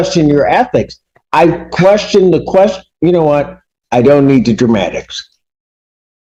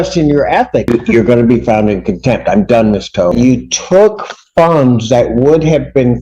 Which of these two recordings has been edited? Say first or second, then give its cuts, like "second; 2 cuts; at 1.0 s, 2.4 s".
second; 2 cuts; at 0.9 s, 3.3 s